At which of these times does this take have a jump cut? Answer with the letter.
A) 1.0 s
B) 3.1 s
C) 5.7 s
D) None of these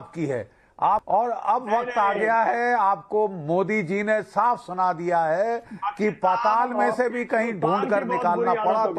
A